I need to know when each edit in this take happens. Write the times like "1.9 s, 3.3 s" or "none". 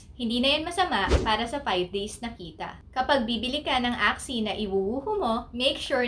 2.5 s